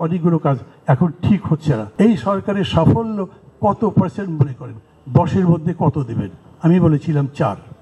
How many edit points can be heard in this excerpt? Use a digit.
1